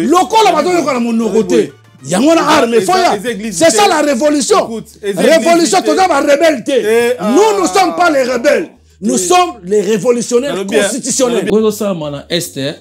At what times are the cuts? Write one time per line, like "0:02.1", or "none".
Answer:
0:11.5